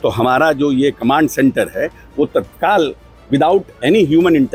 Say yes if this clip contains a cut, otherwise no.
no